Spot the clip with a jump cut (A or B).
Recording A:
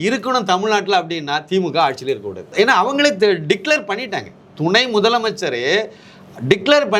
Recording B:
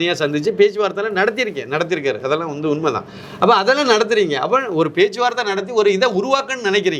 A